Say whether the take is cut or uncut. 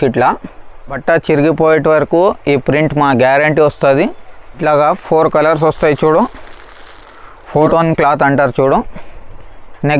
cut